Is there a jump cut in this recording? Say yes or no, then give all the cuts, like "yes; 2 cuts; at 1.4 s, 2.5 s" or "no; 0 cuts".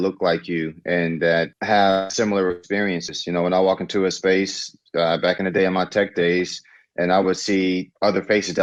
no; 0 cuts